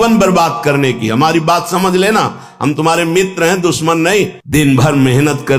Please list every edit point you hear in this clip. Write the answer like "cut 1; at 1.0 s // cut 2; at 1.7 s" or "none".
cut 1; at 4.4 s